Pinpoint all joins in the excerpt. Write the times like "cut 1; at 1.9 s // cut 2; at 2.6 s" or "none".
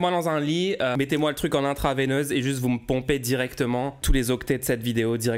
cut 1; at 0.9 s